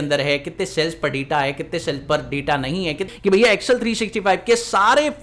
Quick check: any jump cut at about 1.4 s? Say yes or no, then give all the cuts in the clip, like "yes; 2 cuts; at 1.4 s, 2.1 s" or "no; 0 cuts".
no; 1 cut; at 3.1 s